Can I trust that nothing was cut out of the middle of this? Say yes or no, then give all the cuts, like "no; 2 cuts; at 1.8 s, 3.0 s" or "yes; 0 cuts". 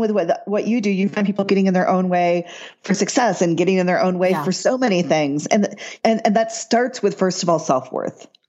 no; 1 cut; at 5.9 s